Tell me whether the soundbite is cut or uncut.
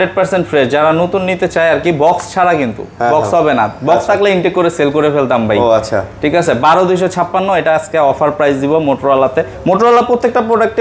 uncut